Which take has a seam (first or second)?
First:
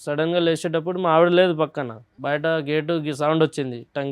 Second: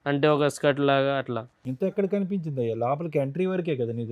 first